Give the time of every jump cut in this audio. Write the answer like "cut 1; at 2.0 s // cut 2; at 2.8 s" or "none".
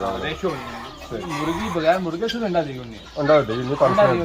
cut 1; at 1.2 s